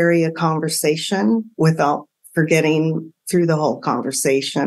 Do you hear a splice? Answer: no; 0 cuts

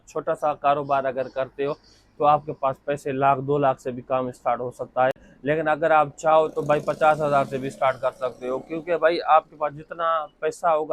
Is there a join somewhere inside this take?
no; 0 cuts

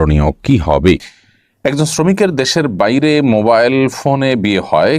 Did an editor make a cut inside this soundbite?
yes; 1 cut; at 1.1 s

